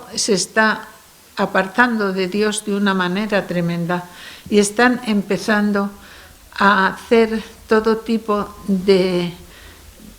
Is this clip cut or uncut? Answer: uncut